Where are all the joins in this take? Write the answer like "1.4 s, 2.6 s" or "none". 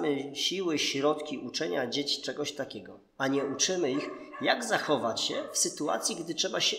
none